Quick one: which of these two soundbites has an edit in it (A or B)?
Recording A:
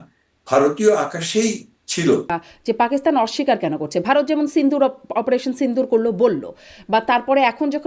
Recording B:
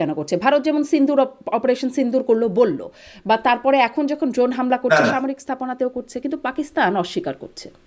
A